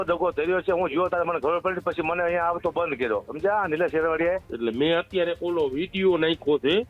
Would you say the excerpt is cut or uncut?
cut